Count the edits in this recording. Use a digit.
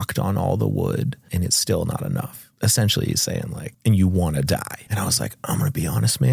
4